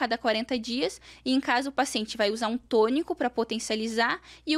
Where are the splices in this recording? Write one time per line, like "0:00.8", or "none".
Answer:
none

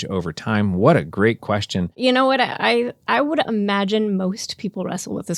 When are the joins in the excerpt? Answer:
0:01.9

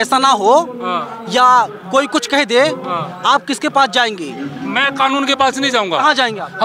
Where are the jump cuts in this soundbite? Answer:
none

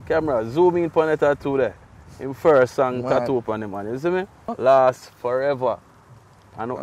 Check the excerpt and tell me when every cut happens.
0:04.5

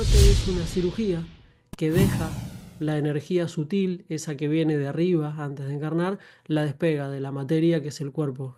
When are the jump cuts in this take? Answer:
none

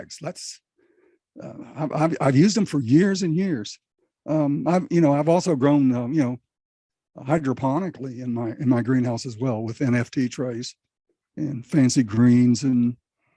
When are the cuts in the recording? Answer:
none

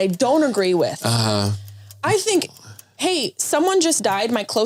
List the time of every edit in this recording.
none

